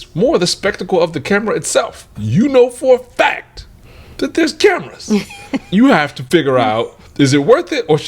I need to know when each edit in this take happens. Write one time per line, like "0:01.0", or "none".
0:02.1
0:05.7

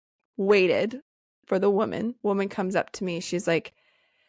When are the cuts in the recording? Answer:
0:02.2

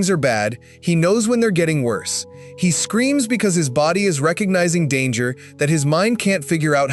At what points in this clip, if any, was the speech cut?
none

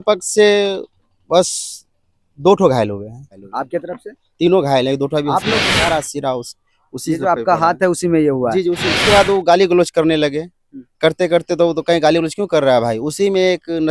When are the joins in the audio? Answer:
0:03.3
0:05.6
0:08.9

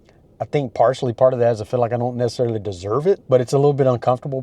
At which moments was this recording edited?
0:03.2

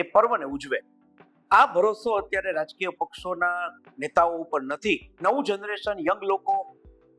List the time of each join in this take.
0:05.1

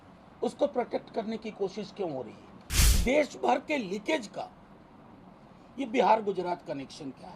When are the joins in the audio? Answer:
0:03.0

